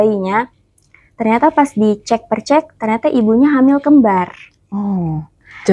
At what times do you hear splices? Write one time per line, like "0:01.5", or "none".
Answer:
none